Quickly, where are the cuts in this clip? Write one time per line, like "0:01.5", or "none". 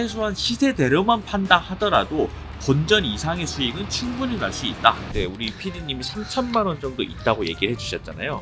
0:05.0